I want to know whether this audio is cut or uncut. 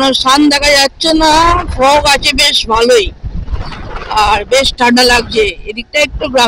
uncut